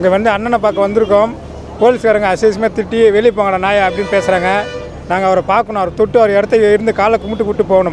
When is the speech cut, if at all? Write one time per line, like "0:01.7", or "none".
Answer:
none

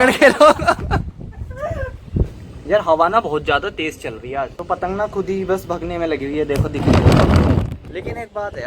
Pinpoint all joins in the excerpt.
0:02.4
0:04.6
0:07.9

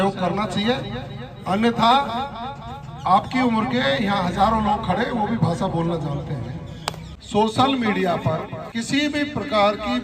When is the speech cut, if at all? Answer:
0:07.1
0:08.6

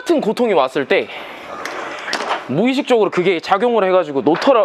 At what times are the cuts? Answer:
none

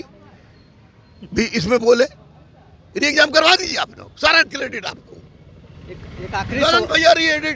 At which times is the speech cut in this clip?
none

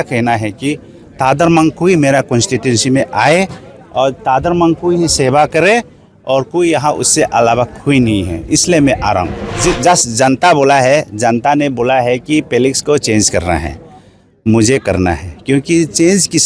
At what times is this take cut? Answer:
0:09.5

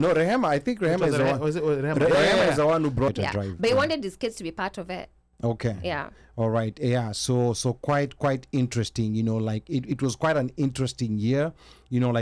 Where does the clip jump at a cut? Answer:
0:03.1

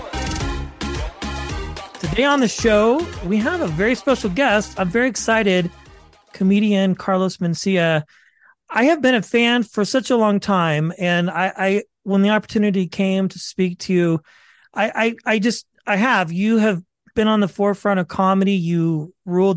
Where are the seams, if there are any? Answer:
0:01.9

